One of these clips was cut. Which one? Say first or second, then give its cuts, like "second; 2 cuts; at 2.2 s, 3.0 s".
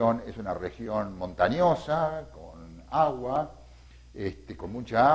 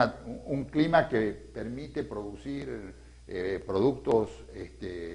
first; 1 cut; at 1.3 s